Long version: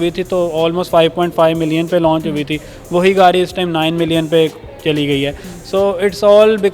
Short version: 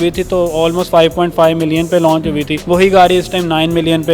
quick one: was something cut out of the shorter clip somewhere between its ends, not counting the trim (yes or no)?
yes